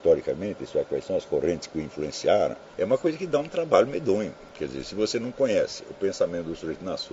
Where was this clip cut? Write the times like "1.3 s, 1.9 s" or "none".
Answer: 2.6 s, 4.5 s